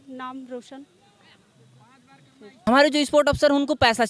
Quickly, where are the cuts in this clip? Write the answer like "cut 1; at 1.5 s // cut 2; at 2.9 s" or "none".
cut 1; at 2.4 s